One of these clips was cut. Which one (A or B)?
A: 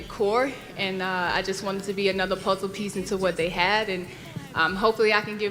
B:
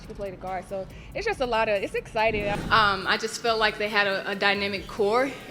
B